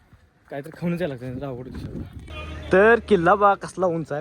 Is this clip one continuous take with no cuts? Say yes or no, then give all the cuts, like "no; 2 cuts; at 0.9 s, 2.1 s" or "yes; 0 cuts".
no; 1 cut; at 2.3 s